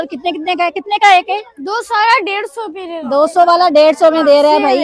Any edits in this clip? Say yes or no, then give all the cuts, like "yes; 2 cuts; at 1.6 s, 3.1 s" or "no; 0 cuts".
no; 0 cuts